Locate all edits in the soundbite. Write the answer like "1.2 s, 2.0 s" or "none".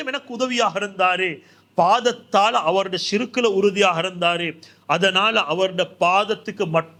none

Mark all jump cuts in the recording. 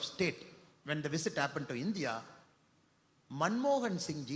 none

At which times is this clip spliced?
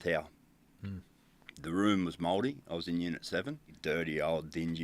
3.8 s

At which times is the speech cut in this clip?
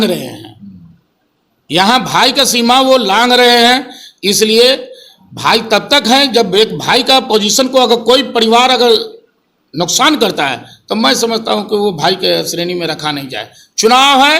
none

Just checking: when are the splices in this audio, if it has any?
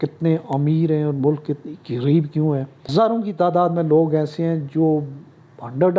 2.9 s

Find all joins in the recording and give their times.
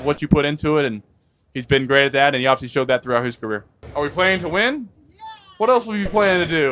3.8 s

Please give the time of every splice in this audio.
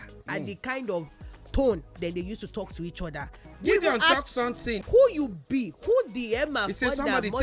3.4 s, 4.7 s

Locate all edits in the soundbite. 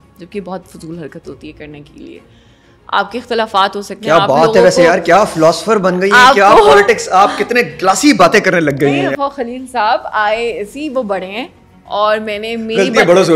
8.7 s

